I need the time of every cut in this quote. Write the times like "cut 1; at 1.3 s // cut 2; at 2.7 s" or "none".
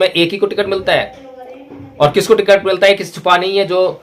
none